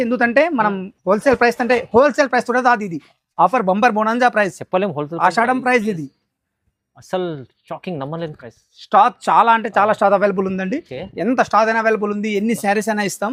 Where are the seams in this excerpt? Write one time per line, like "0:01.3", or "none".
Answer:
none